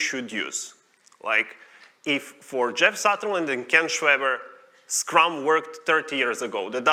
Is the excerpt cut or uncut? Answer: uncut